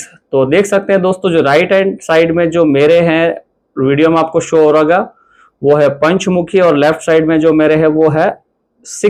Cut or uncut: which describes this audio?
uncut